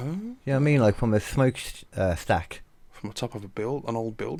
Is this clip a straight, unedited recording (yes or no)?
yes